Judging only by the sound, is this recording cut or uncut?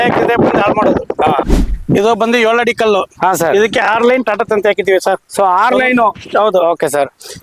cut